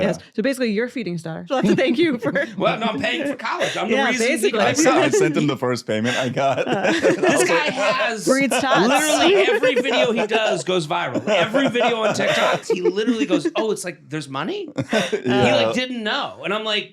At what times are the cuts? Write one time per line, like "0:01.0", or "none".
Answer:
0:12.6